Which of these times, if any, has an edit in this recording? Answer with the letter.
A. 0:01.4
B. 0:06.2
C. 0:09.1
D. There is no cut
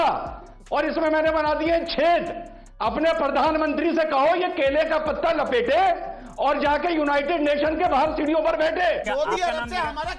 C